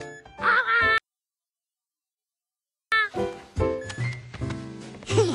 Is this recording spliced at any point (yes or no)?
no